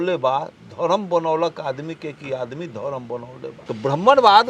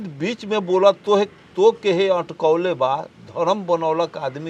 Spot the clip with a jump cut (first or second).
first